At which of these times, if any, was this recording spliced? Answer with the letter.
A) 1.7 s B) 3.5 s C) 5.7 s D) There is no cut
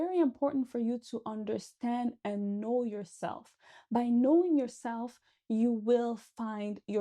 D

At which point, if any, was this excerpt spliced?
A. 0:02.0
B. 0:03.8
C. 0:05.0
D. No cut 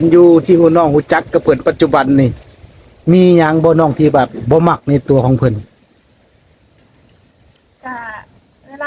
D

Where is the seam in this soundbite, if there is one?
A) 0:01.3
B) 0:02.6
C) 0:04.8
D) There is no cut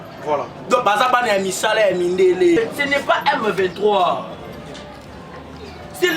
B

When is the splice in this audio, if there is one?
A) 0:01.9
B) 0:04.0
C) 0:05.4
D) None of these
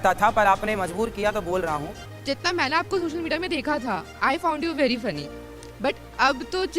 A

